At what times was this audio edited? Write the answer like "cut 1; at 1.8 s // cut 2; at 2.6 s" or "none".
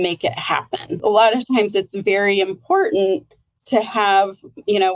cut 1; at 1.0 s